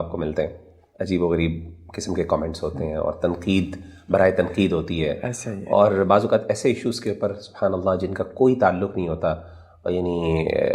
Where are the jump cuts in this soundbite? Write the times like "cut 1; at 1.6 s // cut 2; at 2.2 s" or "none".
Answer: none